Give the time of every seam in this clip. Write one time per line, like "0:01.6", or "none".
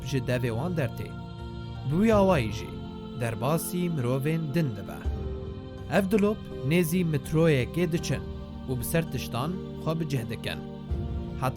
0:08.8